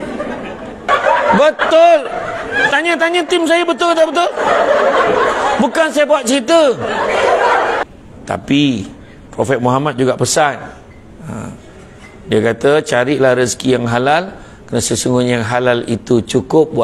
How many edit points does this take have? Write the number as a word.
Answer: two